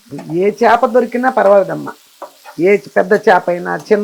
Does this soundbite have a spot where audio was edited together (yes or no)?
no